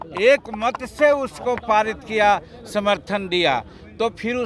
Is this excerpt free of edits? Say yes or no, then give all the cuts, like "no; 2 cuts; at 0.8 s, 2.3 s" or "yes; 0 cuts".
yes; 0 cuts